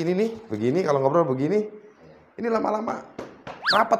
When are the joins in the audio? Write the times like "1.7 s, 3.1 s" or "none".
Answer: none